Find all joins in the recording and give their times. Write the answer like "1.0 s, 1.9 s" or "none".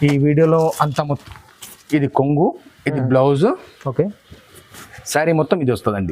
1.1 s